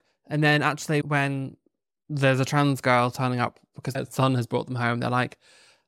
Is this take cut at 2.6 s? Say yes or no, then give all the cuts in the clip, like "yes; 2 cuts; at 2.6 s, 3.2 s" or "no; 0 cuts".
no; 2 cuts; at 1.0 s, 4.0 s